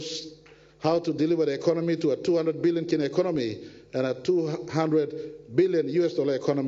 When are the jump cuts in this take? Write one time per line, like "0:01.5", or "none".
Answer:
none